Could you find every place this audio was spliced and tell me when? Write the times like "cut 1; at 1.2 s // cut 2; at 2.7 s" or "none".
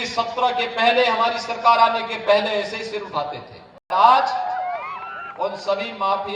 cut 1; at 3.9 s